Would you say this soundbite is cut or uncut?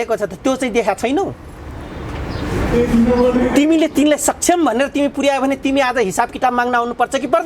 uncut